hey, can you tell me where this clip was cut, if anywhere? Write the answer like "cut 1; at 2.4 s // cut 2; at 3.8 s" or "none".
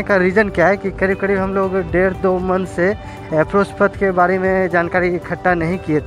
none